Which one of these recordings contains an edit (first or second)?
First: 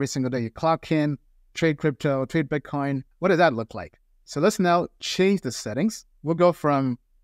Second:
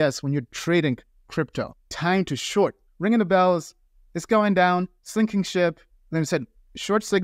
second